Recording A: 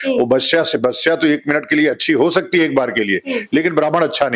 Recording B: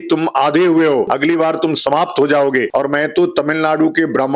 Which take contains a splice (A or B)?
B